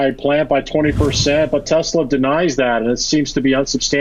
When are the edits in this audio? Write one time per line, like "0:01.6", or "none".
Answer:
none